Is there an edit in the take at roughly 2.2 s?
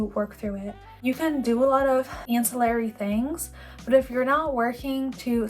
yes; 2 cuts; at 1.0 s, 2.2 s

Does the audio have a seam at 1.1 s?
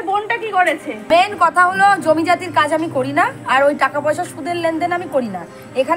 yes; 1 cut; at 1.1 s

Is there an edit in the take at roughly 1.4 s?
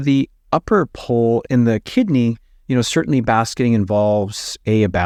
no; 0 cuts

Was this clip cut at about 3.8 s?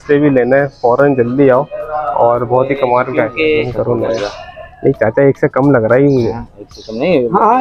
yes; 1 cut; at 3.8 s

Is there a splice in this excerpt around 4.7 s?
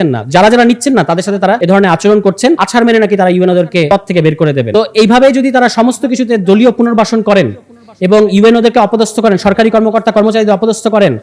yes; 4 cuts; at 1.6 s, 2.6 s, 3.9 s, 4.7 s

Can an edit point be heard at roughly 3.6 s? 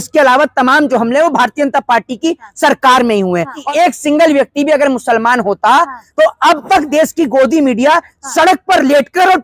yes; 1 cut; at 3.6 s

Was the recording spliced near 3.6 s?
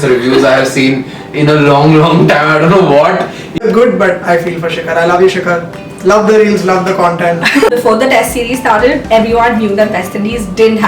yes; 2 cuts; at 3.6 s, 7.7 s

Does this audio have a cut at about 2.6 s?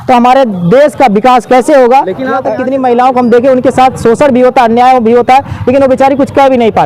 yes; 1 cut; at 2.6 s

